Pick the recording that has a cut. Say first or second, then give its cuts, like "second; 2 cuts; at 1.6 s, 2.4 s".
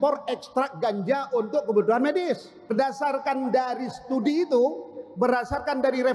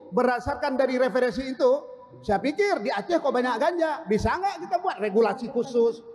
first; 1 cut; at 2.7 s